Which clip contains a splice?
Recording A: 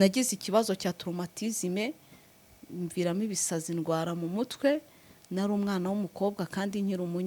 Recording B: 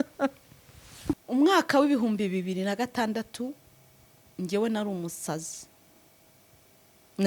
B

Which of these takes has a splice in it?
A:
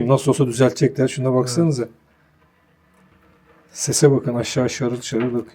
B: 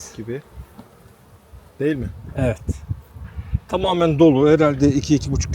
A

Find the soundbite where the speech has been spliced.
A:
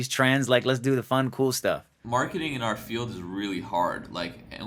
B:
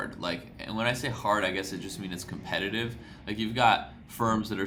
A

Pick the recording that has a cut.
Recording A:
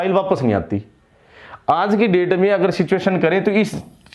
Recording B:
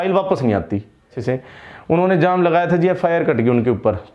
B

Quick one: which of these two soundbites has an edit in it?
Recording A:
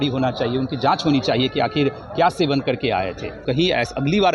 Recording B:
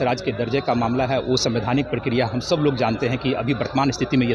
A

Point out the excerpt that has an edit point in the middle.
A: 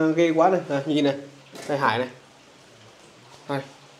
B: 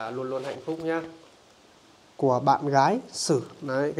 B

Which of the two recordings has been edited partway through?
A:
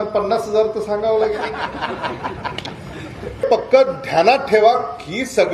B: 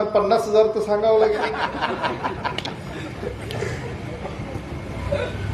A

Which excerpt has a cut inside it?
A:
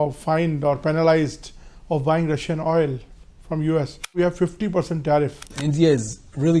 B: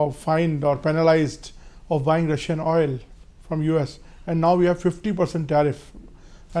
A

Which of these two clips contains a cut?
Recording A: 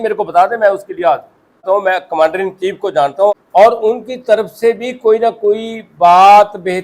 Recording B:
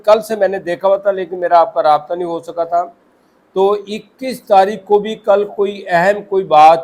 A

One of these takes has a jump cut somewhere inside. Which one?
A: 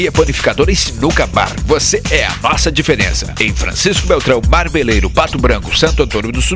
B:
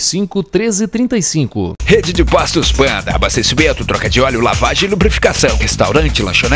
B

